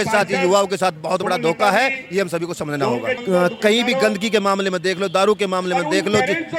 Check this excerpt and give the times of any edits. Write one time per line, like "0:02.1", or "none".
0:03.2